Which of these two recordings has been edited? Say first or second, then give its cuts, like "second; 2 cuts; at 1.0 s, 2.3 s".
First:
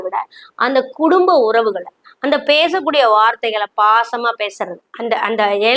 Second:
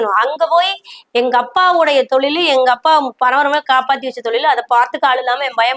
first; 1 cut; at 4.8 s